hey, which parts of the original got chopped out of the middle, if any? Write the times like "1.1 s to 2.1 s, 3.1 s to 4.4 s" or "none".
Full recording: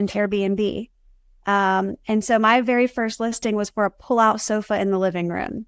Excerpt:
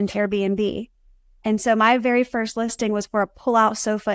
1.3 s to 2.0 s